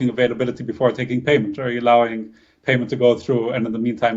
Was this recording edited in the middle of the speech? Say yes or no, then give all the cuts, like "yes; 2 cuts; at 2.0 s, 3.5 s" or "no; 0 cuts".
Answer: no; 0 cuts